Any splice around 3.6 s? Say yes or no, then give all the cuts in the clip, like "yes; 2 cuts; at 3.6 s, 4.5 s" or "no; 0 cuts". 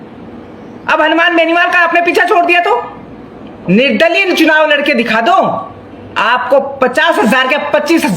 yes; 1 cut; at 3.6 s